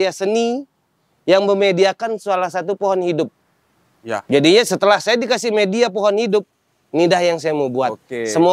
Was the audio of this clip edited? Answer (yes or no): no